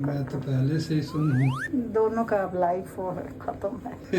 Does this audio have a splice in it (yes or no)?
no